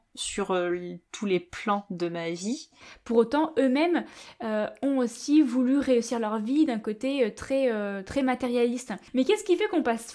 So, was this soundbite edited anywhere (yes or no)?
yes